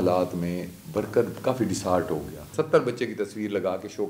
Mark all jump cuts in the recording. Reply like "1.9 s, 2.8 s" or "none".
2.4 s